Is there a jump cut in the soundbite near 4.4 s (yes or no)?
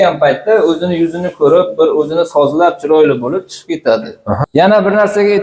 yes